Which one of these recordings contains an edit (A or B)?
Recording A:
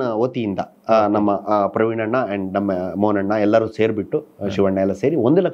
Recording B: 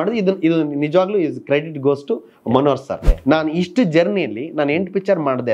B